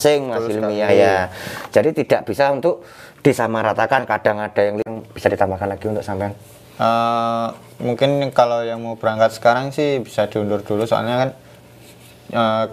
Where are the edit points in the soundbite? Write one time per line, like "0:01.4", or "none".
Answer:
0:04.9